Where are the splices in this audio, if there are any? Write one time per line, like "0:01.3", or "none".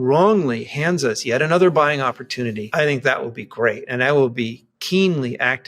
0:02.6